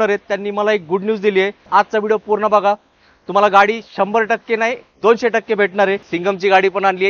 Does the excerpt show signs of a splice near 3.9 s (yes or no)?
no